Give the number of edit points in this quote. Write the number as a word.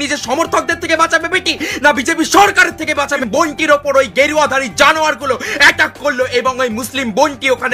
one